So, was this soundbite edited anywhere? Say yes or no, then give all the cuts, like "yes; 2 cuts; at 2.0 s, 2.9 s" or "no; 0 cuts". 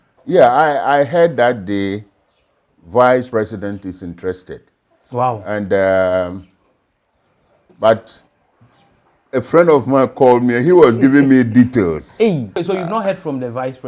yes; 1 cut; at 12.6 s